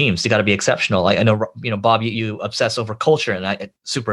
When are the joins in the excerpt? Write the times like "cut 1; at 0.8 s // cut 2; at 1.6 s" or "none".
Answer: cut 1; at 2.1 s